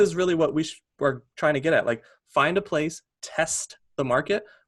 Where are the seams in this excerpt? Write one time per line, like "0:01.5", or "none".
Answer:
none